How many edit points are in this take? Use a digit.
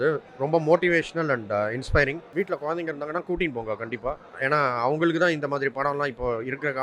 1